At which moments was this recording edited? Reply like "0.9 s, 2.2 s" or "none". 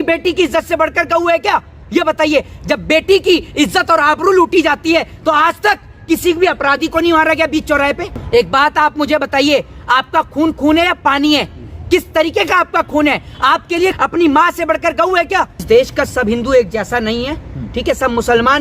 8.1 s, 13.9 s, 15.6 s